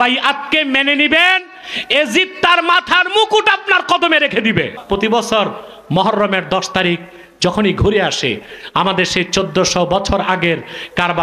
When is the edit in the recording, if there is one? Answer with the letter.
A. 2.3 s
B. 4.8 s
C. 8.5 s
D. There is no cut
B